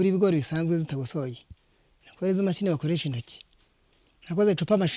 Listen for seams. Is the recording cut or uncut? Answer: uncut